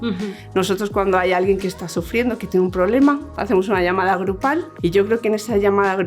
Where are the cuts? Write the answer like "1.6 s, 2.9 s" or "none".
4.7 s

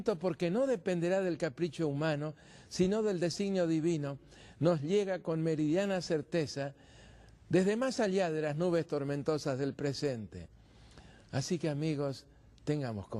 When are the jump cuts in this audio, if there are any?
none

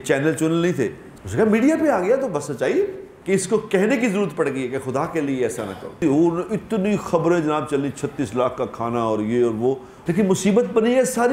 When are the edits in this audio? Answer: 1.0 s, 3.1 s, 6.0 s, 9.9 s

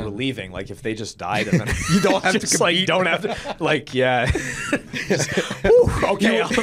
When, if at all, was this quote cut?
none

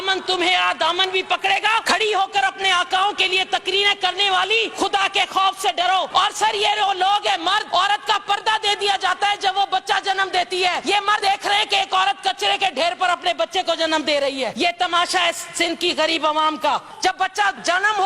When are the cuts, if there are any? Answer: 1.8 s, 4.7 s, 6.1 s, 7.7 s, 10.8 s, 14.5 s, 17.1 s

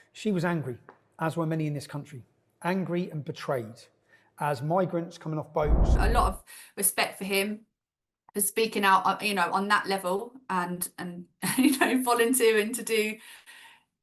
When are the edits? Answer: 6.0 s

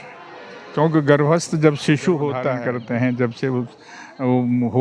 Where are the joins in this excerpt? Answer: 2.5 s

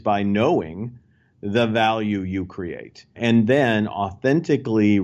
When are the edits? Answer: 3.2 s

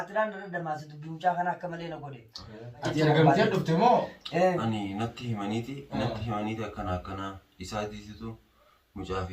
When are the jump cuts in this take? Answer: 2.8 s

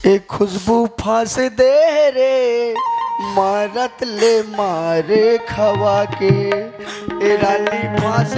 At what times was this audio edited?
none

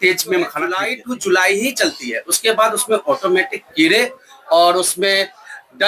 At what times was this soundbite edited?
0.9 s

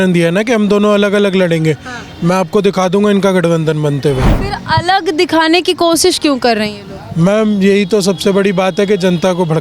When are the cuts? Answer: 4.4 s

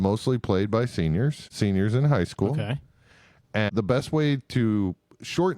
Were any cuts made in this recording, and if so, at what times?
1.5 s, 3.7 s

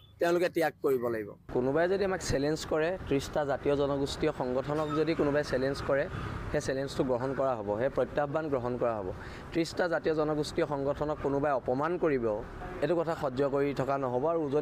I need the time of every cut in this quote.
1.3 s

